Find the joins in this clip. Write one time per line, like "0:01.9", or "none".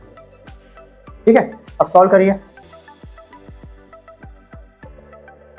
0:02.7